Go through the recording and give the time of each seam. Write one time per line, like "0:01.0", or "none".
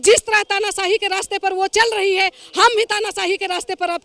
none